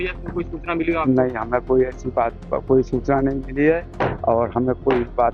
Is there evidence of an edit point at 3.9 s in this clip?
yes; 1 cut; at 3.9 s

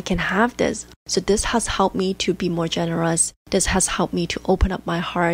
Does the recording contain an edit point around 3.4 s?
no; 1 cut; at 1.0 s

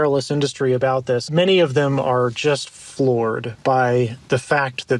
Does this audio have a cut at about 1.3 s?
yes; 1 cut; at 1.3 s

